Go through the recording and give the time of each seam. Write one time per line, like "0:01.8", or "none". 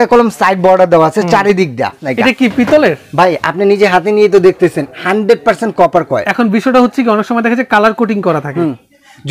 0:02.0